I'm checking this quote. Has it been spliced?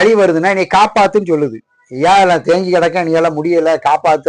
no; 0 cuts

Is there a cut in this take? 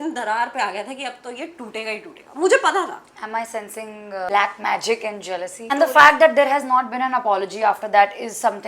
yes; 2 cuts; at 4.3 s, 5.6 s

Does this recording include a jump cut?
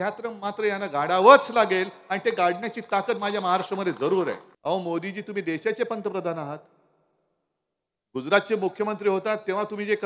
yes; 1 cut; at 4.5 s

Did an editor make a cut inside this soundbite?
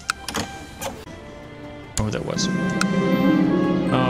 yes; 1 cut; at 1.0 s

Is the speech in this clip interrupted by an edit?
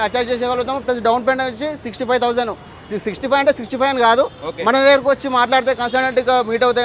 no; 0 cuts

